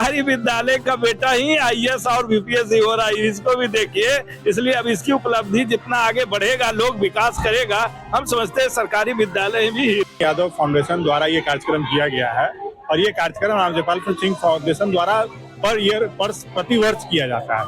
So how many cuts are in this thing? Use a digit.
1